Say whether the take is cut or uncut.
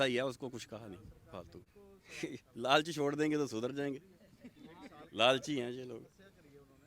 cut